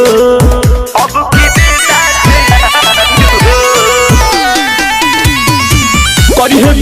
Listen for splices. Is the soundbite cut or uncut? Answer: uncut